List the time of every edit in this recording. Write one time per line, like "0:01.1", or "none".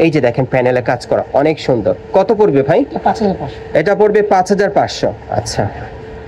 none